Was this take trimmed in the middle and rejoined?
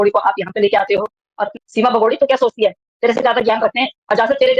yes; 1 cut; at 1.4 s

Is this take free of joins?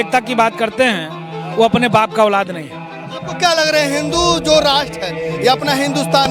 yes; 0 cuts

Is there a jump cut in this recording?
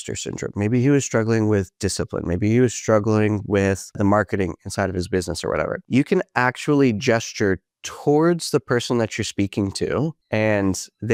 no; 0 cuts

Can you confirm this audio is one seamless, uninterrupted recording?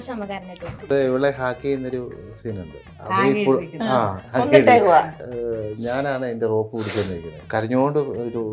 no; 5 cuts; at 0.8 s, 2.9 s, 4.2 s, 5.2 s, 7.3 s

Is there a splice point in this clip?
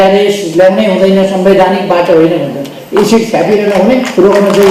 no; 0 cuts

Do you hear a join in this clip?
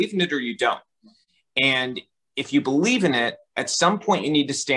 no; 0 cuts

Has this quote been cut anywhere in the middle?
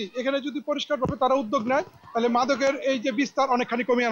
no; 0 cuts

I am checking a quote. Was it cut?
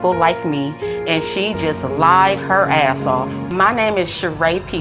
yes; 1 cut; at 3.4 s

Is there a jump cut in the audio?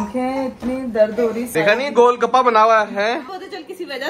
yes; 1 cut; at 1.5 s

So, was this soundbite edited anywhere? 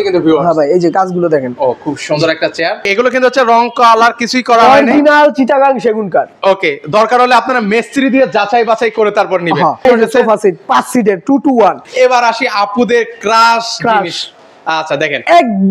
yes; 3 cuts; at 2.8 s, 9.8 s, 11.8 s

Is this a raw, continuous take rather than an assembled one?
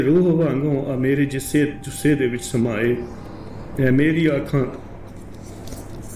yes; 0 cuts

